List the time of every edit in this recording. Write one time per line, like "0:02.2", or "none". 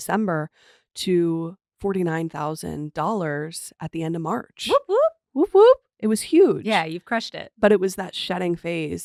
none